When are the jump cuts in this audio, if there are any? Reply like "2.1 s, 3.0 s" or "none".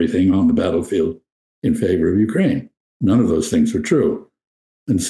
2.8 s